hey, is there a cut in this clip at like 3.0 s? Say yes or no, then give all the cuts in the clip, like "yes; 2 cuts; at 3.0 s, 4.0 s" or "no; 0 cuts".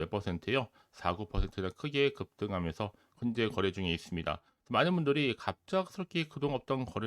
yes; 1 cut; at 3.0 s